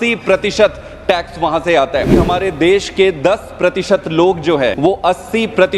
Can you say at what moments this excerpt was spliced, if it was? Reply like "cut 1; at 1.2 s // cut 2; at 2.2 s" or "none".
cut 1; at 2.2 s // cut 2; at 4.8 s

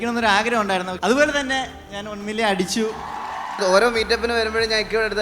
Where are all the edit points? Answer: cut 1; at 0.9 s // cut 2; at 3.3 s

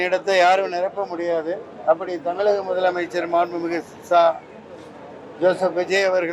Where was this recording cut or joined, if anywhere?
none

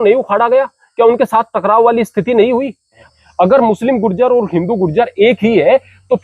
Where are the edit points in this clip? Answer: cut 1; at 3.0 s

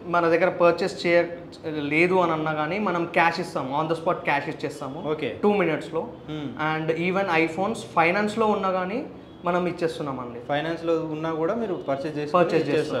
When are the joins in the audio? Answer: none

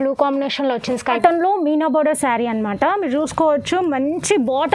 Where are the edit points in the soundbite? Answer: cut 1; at 1.1 s

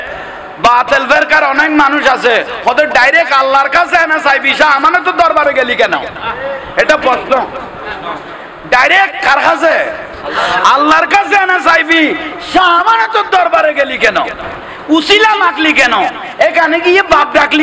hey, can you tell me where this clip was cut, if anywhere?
none

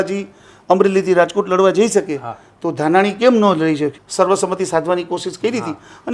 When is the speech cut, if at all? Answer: cut 1; at 4.0 s

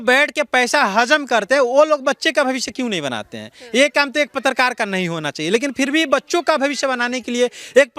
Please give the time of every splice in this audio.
none

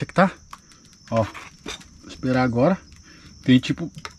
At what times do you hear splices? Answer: none

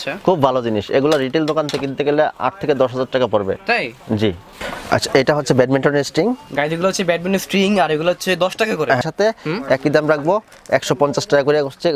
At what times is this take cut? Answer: cut 1; at 4.7 s // cut 2; at 9.0 s

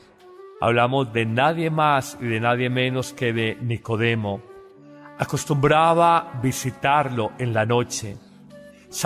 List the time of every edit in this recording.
cut 1; at 7.1 s

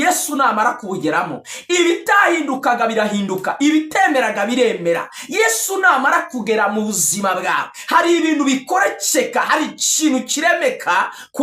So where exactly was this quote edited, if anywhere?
none

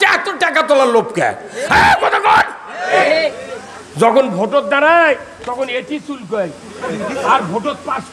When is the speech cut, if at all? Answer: cut 1; at 2.9 s

